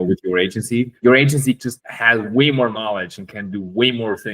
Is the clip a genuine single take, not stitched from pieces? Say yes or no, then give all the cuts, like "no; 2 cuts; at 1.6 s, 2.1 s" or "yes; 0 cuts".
no; 2 cuts; at 0.9 s, 1.7 s